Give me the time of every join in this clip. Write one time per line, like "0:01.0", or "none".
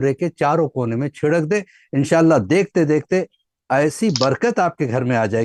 none